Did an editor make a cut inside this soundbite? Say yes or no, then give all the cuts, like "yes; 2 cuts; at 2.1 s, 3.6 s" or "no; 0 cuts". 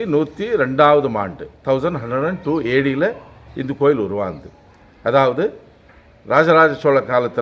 no; 0 cuts